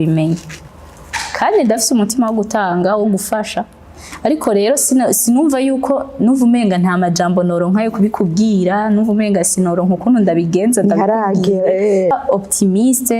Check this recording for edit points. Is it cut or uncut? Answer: cut